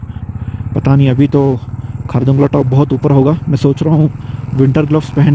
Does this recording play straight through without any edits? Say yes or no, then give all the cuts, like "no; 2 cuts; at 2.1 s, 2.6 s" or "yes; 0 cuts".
yes; 0 cuts